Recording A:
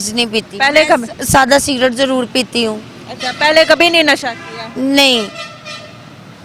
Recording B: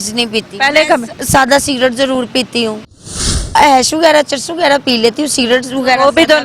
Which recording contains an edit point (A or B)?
B